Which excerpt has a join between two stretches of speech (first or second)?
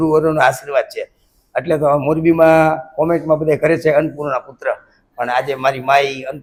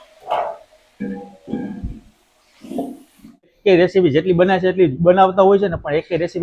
second